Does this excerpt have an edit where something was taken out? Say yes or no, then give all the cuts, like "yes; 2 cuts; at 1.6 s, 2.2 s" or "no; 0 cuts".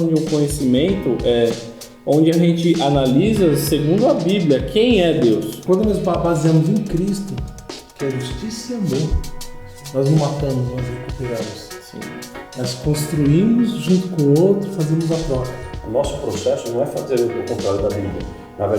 yes; 2 cuts; at 5.5 s, 15.8 s